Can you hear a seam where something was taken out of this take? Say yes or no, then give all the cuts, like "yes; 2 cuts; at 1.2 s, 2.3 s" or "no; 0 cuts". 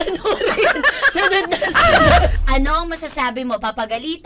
yes; 1 cut; at 2.4 s